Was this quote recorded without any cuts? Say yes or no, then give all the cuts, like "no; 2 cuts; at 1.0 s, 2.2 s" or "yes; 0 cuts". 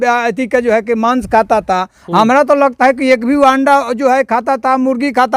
yes; 0 cuts